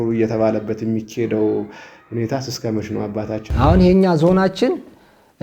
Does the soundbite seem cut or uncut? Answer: cut